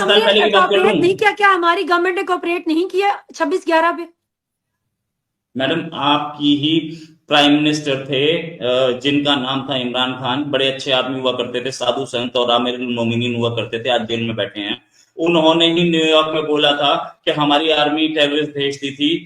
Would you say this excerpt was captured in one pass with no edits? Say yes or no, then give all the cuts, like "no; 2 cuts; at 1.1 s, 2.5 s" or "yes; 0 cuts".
yes; 0 cuts